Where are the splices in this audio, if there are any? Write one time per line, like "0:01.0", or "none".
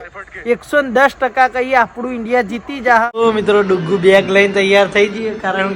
0:03.1